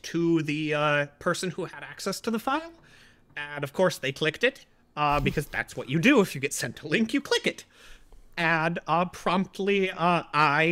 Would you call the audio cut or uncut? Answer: uncut